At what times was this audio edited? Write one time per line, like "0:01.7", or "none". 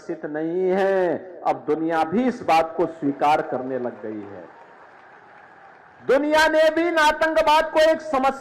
none